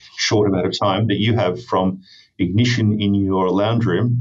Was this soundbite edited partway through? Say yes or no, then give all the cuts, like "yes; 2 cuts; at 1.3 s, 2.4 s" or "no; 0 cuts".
no; 0 cuts